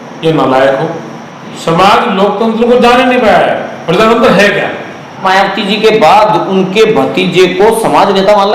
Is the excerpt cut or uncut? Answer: cut